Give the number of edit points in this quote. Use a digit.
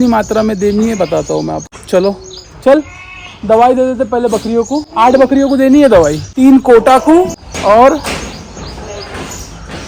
0